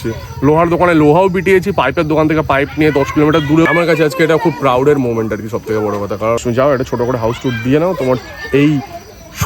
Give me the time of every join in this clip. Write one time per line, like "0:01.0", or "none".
0:03.7
0:06.4